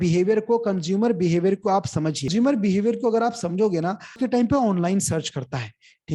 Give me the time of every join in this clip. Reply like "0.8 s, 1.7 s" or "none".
2.3 s, 4.1 s